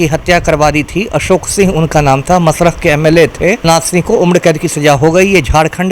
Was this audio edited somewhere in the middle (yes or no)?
yes